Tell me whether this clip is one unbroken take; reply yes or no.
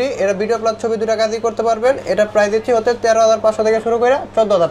yes